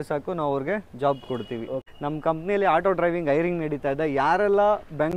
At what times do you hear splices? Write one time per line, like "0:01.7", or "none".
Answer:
0:01.8

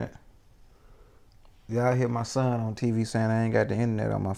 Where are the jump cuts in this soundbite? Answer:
none

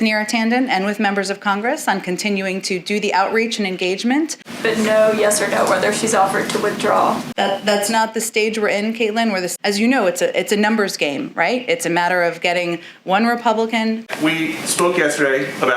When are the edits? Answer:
0:04.4
0:09.5
0:14.1

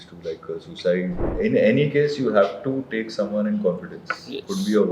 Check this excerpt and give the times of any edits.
0:01.2

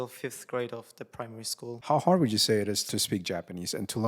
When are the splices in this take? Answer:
0:01.8
0:02.8

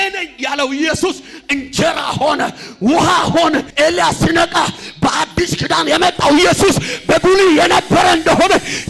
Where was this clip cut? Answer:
0:03.7

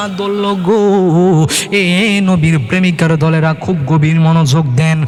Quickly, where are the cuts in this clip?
none

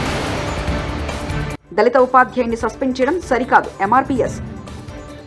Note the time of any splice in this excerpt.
0:01.5

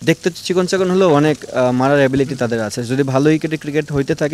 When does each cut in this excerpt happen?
none

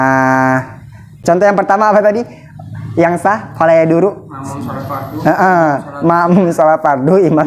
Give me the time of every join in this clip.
0:01.1

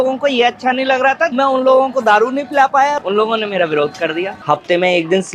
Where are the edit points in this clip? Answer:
0:01.3
0:03.0
0:04.3

